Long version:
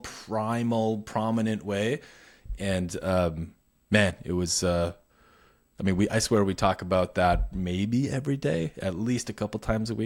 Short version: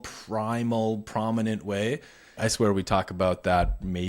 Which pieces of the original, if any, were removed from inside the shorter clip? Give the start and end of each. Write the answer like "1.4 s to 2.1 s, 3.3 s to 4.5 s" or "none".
2.4 s to 6.1 s